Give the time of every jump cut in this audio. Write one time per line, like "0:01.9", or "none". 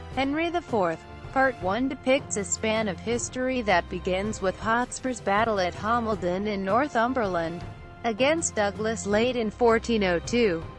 0:01.0

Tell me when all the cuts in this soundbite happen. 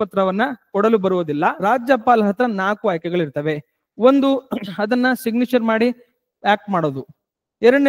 0:01.6

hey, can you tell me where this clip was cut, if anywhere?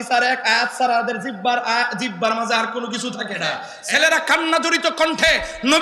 0:03.7

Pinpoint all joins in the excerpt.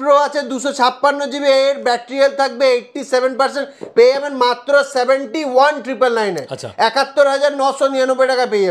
none

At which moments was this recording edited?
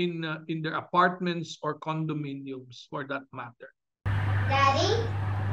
0:04.1

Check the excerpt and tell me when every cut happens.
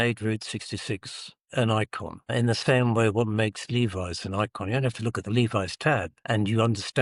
none

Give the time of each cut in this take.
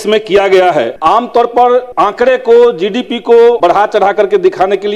0:00.9
0:01.9
0:03.6

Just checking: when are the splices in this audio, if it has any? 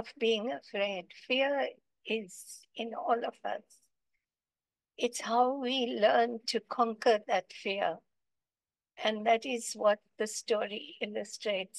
none

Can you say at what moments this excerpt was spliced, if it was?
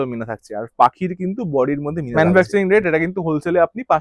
0:02.1

